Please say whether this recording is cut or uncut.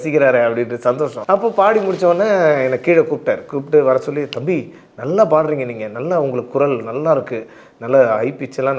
cut